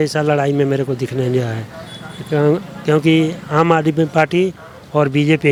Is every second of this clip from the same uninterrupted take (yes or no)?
yes